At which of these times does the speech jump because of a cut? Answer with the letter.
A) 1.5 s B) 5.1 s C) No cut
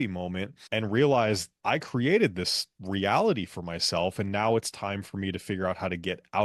C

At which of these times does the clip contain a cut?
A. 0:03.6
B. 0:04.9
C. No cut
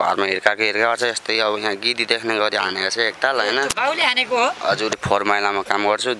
B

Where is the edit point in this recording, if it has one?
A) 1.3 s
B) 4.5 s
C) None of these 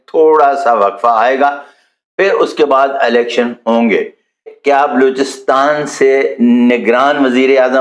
B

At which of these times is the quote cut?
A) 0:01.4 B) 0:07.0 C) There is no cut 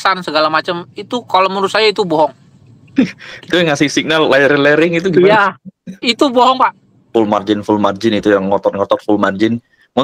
B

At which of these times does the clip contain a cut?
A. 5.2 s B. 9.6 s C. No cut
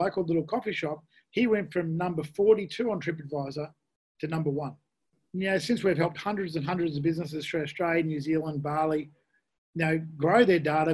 A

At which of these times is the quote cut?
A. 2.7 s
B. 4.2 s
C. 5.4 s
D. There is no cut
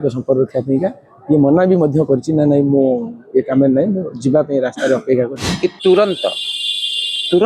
C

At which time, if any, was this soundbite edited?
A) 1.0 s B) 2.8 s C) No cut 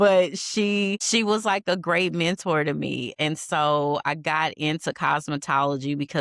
A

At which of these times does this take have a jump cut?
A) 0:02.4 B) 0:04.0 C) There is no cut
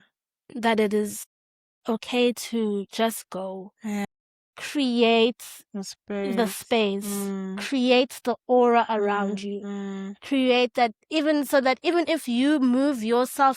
B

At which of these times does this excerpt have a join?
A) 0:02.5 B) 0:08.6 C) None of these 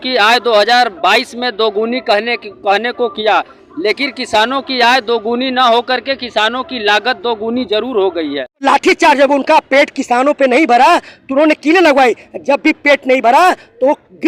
B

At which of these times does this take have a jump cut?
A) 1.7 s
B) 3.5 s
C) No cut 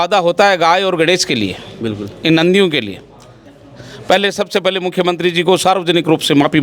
B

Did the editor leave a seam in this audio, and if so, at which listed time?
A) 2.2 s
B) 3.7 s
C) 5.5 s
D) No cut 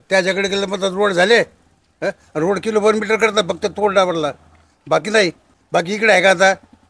C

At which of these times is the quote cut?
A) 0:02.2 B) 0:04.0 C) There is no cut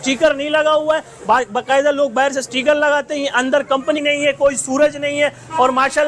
B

